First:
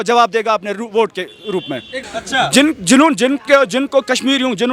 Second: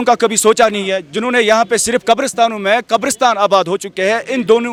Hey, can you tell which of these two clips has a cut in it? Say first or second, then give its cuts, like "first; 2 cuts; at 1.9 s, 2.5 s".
first; 1 cut; at 2.0 s